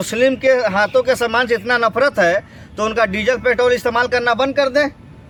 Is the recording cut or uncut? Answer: uncut